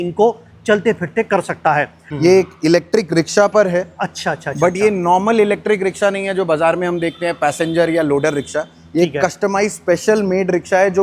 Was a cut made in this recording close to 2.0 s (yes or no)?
yes